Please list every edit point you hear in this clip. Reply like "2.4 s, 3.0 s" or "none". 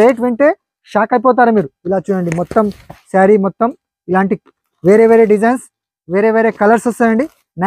none